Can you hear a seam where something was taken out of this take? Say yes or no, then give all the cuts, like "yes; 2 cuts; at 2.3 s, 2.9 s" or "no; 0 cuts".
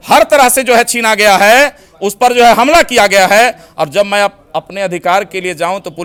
no; 0 cuts